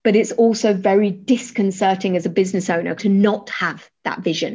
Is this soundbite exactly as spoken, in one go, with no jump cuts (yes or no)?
no